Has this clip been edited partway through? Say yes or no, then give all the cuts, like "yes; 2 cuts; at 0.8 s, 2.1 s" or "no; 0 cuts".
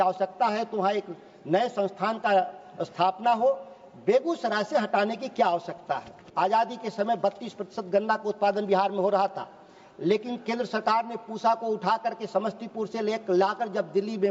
yes; 1 cut; at 6.2 s